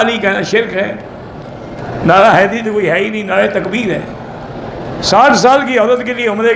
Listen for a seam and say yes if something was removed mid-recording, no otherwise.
yes